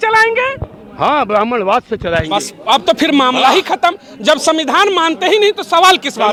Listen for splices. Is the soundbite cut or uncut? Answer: uncut